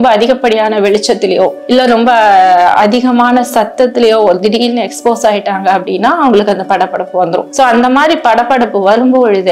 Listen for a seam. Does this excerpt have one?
no; 0 cuts

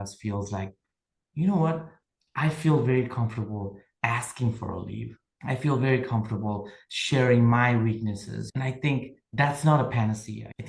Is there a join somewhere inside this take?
no; 0 cuts

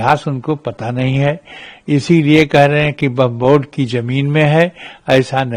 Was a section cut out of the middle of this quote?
no; 0 cuts

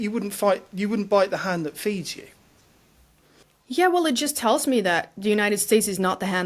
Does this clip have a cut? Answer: yes; 1 cut; at 3.4 s

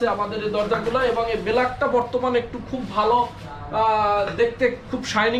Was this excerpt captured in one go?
yes; 0 cuts

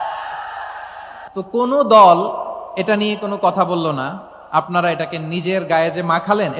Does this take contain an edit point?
yes; 1 cut; at 1.1 s

